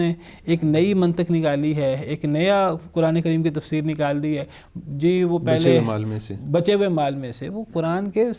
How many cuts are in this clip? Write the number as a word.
zero